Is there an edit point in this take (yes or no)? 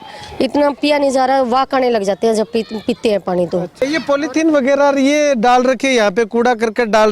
yes